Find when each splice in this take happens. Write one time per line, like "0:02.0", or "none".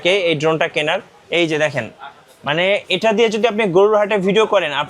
0:01.2